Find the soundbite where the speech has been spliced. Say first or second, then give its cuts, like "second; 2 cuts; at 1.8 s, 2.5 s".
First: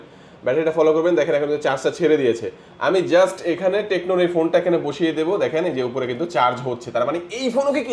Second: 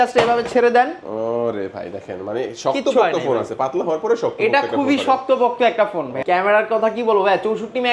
second; 1 cut; at 6.2 s